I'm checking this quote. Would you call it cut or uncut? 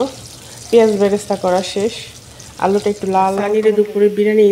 cut